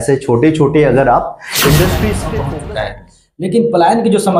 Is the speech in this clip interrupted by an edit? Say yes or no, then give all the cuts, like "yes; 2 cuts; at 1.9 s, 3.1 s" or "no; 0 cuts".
yes; 1 cut; at 2.3 s